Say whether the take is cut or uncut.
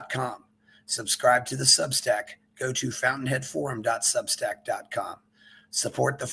uncut